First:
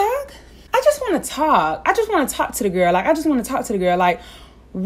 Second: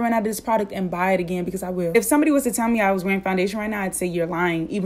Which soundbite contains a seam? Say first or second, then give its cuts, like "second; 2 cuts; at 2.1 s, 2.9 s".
second; 1 cut; at 1.9 s